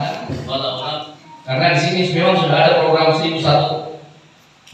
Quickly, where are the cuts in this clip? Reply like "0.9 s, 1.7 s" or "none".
1.1 s